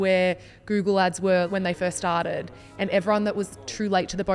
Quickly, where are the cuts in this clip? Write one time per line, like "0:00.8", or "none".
0:01.5

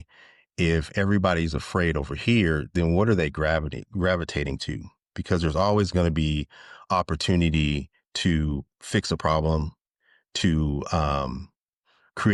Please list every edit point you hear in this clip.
none

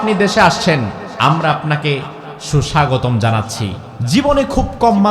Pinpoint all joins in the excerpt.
0:01.0
0:03.9

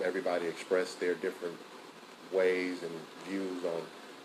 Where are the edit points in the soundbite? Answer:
none

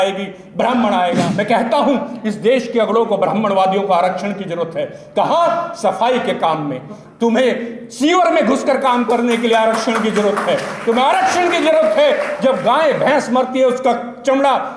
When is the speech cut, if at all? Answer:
0:01.2

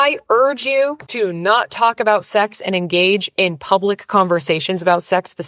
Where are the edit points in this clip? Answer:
none

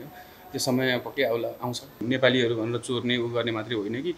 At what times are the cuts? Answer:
0:02.0

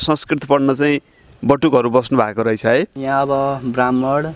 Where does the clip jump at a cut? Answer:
0:03.0

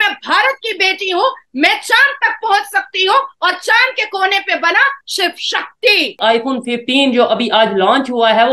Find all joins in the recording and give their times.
0:06.2

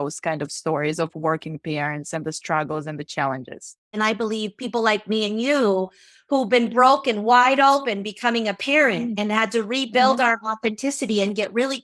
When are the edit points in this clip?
0:03.9

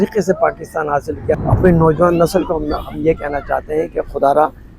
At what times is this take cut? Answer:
0:01.4

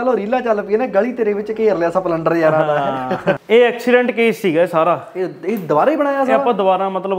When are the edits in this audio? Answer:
0:03.4

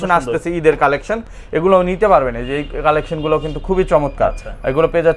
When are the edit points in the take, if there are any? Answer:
none

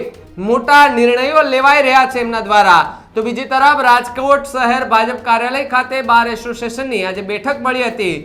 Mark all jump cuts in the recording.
none

